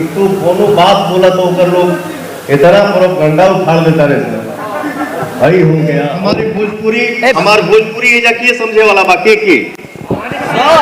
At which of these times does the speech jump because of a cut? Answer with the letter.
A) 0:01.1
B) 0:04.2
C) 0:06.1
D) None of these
C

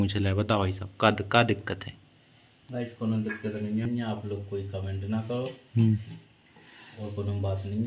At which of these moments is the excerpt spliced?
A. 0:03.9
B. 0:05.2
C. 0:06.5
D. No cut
A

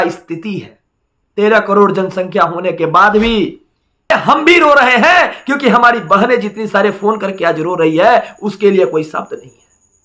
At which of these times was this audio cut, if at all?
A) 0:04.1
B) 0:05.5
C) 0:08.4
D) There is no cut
A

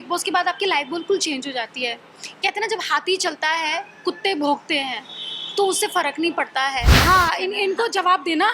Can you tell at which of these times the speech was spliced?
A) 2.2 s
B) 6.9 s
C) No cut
B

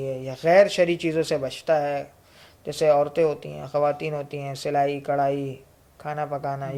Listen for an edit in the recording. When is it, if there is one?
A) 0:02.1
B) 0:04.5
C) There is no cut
C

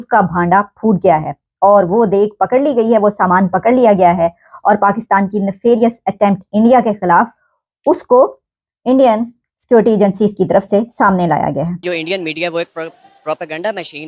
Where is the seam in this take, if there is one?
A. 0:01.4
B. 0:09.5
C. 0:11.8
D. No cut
C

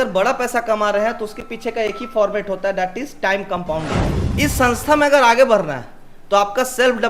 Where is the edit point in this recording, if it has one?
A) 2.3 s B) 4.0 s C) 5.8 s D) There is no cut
B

